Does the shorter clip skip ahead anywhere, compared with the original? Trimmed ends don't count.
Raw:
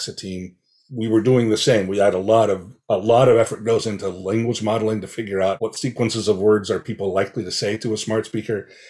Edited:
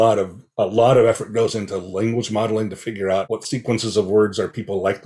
no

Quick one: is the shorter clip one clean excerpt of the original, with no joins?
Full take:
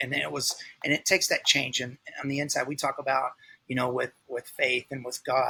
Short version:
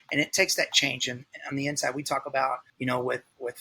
no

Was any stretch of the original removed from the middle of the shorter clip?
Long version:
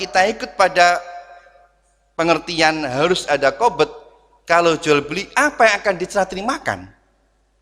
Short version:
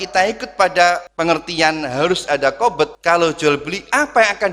yes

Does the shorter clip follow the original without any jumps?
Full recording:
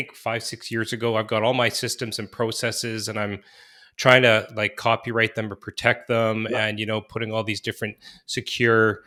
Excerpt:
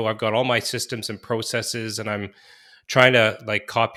yes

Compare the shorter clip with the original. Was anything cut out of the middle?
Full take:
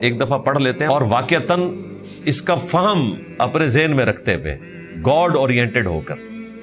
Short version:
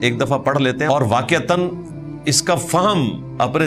no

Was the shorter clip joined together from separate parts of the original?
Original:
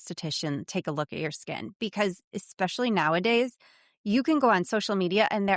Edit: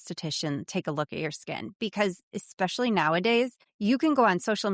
yes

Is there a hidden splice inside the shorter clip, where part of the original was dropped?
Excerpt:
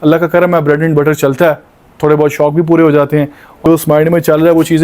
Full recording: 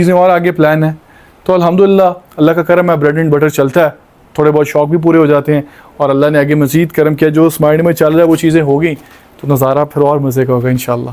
yes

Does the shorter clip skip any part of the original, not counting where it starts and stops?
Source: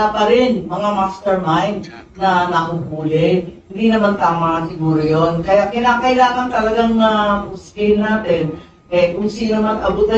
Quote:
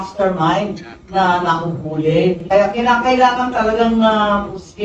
yes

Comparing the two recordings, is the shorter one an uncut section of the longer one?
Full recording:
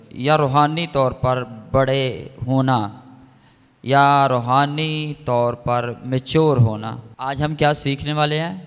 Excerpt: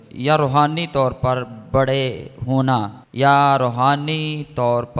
no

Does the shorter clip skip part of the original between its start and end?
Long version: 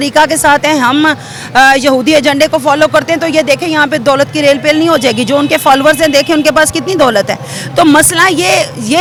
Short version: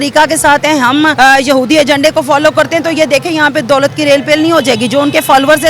yes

